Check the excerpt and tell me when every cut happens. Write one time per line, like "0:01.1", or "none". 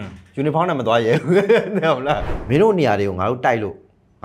0:02.3